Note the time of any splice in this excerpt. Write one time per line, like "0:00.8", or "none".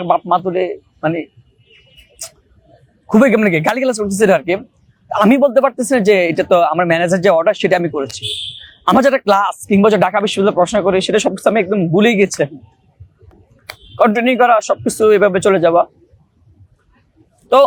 none